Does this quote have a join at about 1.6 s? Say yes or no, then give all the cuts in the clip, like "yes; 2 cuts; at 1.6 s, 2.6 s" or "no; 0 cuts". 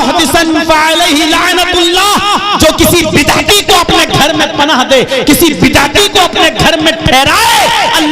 no; 0 cuts